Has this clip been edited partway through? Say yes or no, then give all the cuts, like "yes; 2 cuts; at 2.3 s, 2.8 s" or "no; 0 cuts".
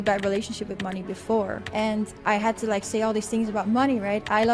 yes; 1 cut; at 2.1 s